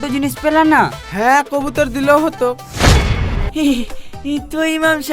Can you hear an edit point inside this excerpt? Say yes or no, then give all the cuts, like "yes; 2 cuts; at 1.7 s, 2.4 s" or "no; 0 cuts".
yes; 1 cut; at 3.4 s